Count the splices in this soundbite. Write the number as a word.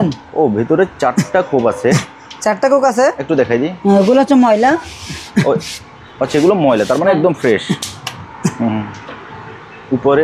zero